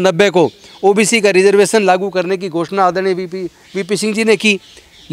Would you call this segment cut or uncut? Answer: uncut